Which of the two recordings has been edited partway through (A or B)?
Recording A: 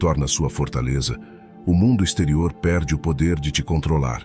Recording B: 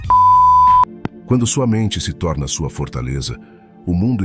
B